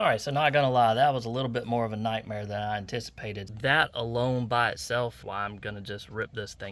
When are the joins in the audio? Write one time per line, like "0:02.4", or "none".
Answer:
0:03.4
0:05.2